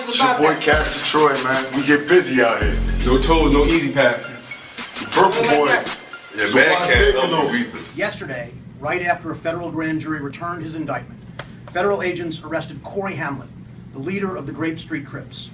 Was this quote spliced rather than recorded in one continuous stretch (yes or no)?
yes